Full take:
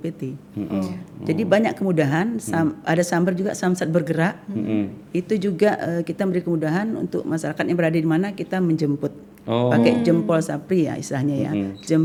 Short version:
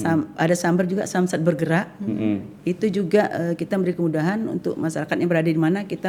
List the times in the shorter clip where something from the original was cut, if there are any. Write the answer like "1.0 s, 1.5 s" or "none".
none